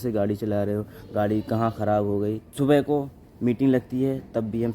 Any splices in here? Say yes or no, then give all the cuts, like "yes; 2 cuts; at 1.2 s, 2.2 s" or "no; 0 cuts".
yes; 1 cut; at 2.5 s